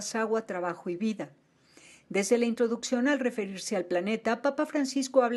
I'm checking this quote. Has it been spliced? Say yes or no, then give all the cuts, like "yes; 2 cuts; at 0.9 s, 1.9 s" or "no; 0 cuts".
no; 0 cuts